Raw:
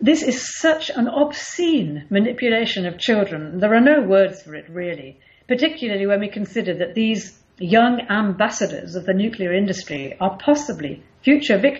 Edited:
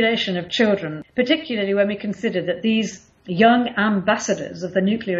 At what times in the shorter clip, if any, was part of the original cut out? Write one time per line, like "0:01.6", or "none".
0:00.9